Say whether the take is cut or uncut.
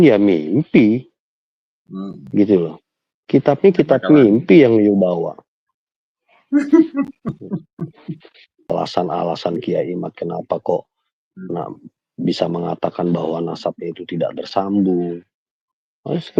cut